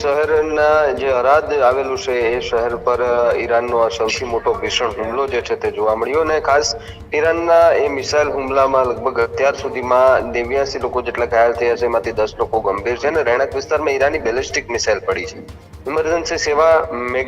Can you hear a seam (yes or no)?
no